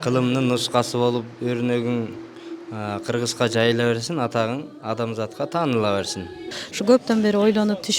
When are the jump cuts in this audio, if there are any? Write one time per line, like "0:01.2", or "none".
0:06.4